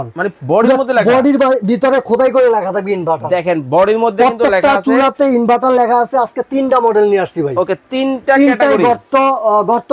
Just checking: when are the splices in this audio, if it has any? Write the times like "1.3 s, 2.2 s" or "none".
none